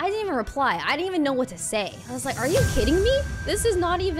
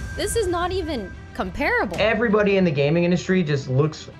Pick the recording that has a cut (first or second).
second